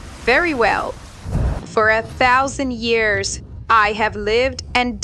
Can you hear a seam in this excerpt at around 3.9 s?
no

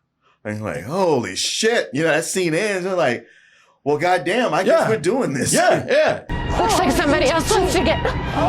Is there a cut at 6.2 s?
yes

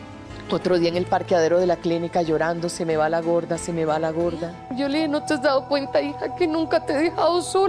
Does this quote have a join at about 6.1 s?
no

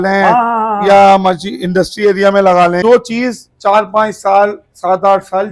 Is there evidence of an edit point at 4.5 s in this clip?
no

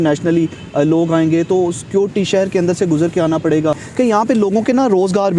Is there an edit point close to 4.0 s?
yes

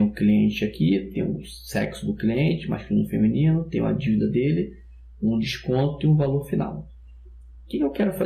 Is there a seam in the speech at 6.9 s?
no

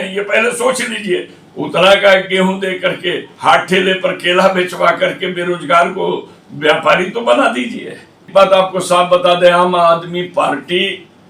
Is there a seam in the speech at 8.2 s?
yes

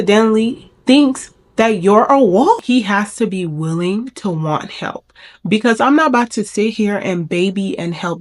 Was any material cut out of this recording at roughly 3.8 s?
no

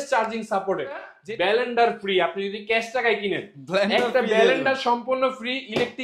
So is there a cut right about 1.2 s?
yes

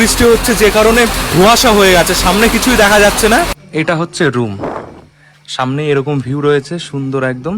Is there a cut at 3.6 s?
yes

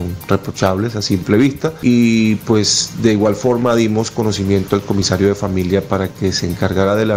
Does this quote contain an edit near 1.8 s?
yes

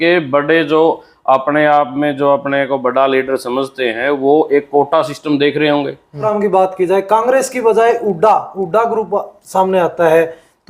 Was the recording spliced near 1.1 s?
no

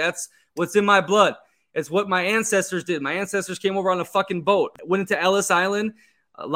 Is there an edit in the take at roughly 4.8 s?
yes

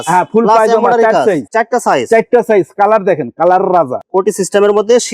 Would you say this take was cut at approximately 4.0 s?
yes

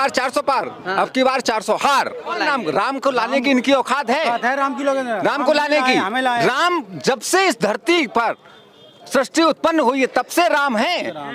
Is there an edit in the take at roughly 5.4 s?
no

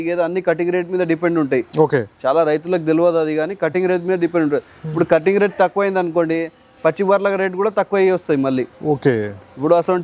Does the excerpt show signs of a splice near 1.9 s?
no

